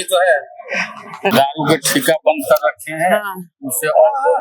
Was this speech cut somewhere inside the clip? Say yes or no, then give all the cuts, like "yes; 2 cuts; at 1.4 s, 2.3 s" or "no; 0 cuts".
yes; 1 cut; at 1.3 s